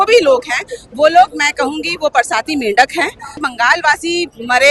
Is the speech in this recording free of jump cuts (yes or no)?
no